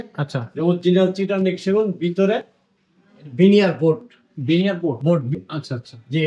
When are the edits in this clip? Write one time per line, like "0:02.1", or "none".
0:05.3